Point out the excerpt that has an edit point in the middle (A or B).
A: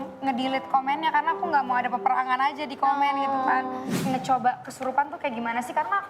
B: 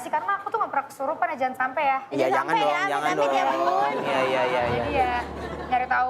A